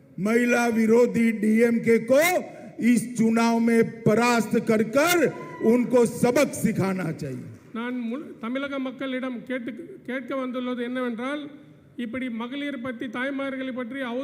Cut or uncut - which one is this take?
uncut